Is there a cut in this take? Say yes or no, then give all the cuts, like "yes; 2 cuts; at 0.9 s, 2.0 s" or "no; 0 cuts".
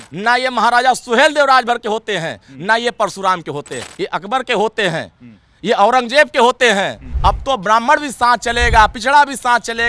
yes; 2 cuts; at 3.8 s, 7.0 s